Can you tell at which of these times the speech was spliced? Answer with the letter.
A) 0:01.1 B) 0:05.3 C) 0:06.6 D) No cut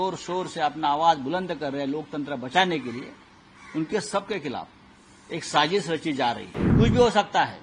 C